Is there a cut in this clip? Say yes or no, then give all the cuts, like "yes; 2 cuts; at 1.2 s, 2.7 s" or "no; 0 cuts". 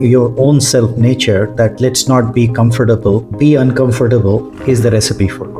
yes; 2 cuts; at 3.3 s, 4.5 s